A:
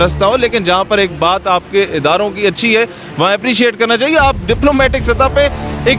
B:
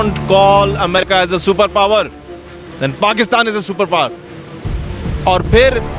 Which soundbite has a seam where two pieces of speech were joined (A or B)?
B